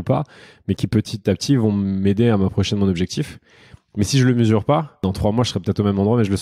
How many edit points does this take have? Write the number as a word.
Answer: one